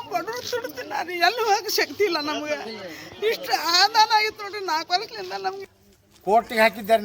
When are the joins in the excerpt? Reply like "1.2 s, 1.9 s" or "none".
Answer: 5.7 s